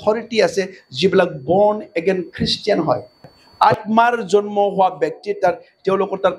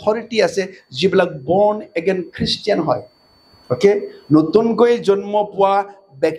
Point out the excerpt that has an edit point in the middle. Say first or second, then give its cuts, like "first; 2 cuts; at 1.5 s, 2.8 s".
first; 1 cut; at 3.4 s